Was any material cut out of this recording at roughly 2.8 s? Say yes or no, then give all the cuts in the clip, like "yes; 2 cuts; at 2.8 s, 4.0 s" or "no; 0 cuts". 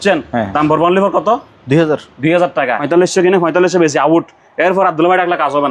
yes; 1 cut; at 2.8 s